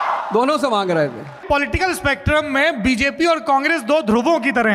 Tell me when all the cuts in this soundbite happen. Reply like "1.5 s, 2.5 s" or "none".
1.4 s